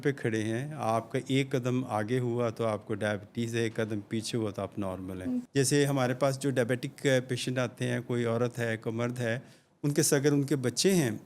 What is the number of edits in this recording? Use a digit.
1